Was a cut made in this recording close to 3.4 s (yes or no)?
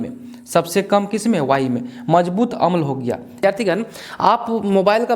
yes